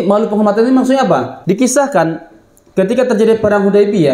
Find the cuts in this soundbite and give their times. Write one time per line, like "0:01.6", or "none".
0:01.3